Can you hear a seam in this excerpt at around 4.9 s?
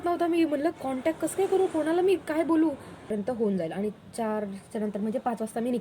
no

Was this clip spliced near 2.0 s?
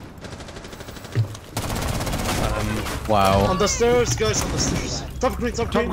no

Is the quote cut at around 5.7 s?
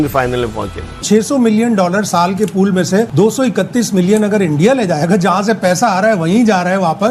no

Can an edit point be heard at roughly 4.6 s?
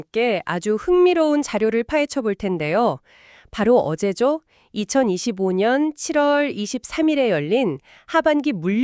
no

